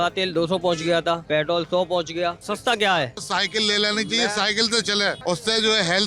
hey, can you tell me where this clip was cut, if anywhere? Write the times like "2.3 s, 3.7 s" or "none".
1.2 s, 2.4 s, 3.2 s, 5.2 s